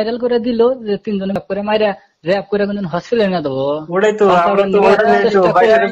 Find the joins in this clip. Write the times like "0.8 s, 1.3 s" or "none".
1.4 s